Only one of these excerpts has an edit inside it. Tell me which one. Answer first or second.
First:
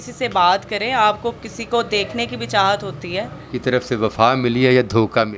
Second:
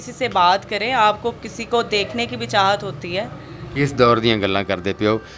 first